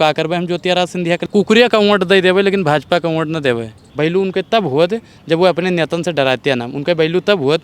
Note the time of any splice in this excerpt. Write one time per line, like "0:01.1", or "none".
0:01.2
0:03.8